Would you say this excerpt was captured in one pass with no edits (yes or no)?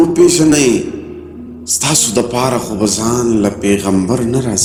yes